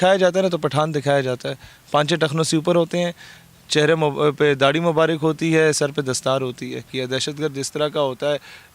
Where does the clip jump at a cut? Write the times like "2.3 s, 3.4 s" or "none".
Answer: 6.9 s